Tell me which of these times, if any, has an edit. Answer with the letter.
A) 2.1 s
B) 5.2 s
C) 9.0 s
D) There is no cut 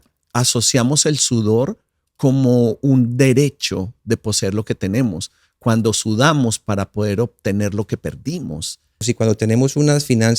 C